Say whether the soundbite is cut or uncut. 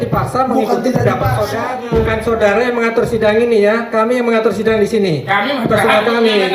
cut